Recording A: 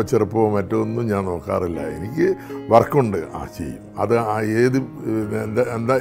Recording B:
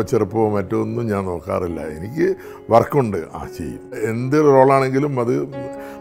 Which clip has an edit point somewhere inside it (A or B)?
B